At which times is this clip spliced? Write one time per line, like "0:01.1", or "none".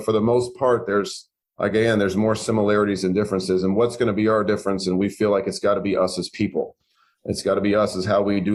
none